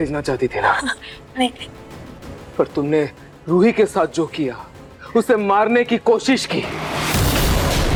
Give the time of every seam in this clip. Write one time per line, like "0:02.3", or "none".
none

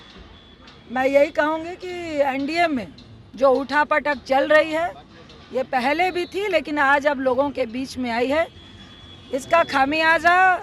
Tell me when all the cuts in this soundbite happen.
none

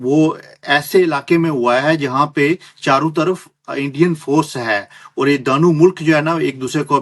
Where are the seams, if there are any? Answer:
none

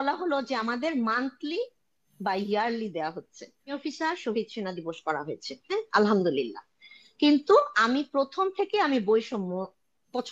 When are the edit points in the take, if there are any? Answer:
0:03.7

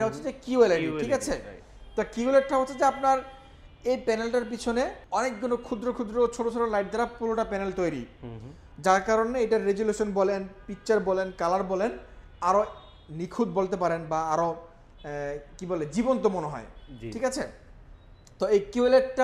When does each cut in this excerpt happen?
none

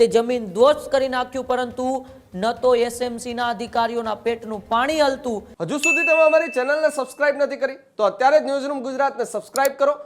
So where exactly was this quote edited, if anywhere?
0:05.5

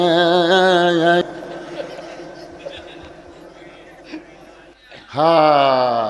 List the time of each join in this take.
0:01.2
0:04.7

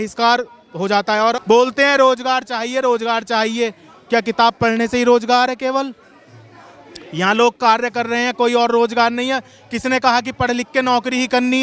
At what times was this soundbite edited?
0:01.4

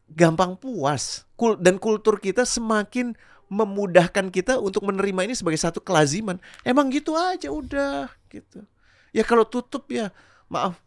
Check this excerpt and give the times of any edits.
none

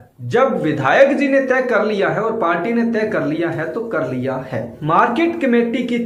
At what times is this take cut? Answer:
none

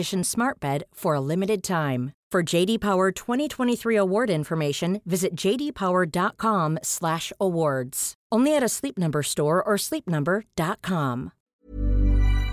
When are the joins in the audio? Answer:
0:11.6

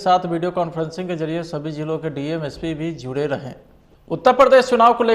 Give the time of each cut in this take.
0:04.2

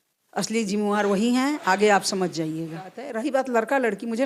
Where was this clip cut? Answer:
0:03.0

